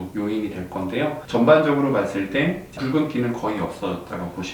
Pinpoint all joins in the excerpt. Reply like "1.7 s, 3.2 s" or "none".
1.2 s